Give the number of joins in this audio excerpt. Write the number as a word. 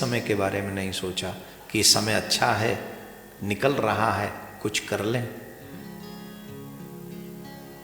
zero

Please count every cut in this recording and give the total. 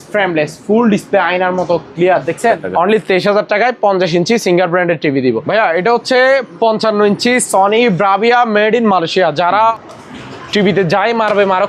three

